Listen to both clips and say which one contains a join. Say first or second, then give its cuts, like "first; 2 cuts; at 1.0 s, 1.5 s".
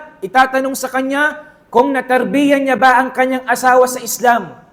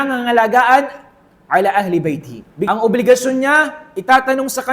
second; 1 cut; at 2.7 s